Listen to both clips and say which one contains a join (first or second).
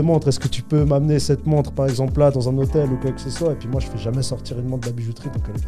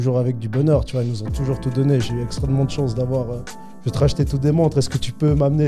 second